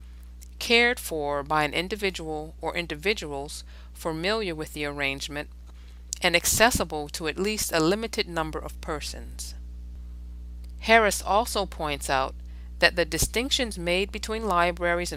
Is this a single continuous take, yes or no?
yes